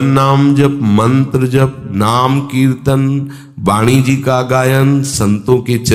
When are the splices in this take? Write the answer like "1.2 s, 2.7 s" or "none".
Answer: none